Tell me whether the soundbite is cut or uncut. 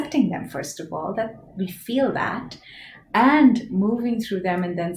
uncut